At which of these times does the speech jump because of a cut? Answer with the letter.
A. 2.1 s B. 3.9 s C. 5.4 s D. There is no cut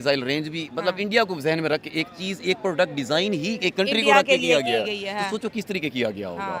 D